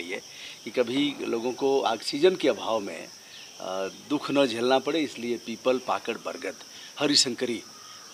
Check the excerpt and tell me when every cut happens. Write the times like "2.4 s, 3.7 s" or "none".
none